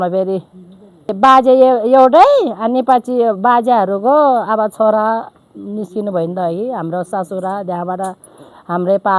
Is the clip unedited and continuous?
no; 1 cut; at 1.1 s

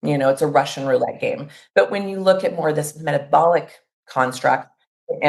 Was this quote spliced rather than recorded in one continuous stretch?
yes; 1 cut; at 1.5 s

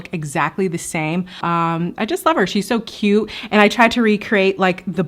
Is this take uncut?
no; 1 cut; at 1.4 s

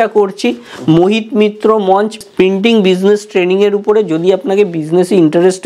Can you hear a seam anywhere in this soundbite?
yes; 1 cut; at 2.2 s

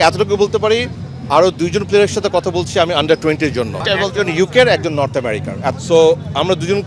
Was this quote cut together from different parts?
yes; 2 cuts; at 3.8 s, 5.7 s

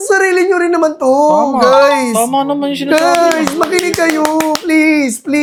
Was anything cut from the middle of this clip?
no; 0 cuts

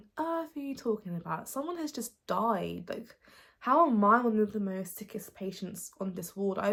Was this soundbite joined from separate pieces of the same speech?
no; 0 cuts

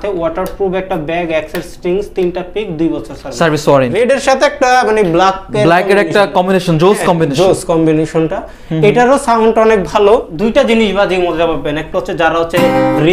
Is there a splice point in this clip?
yes; 2 cuts; at 3.9 s, 10.3 s

